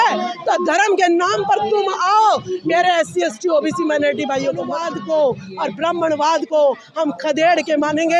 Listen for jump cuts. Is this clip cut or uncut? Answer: cut